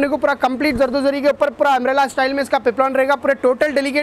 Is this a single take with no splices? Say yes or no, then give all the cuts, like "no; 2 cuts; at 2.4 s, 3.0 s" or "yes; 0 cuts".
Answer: yes; 0 cuts